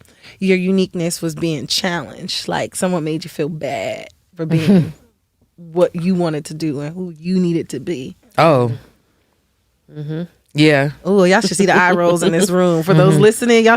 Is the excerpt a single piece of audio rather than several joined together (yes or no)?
yes